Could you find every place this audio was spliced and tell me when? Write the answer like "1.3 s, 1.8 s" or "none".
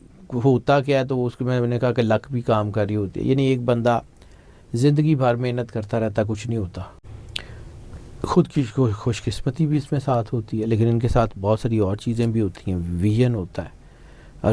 7.0 s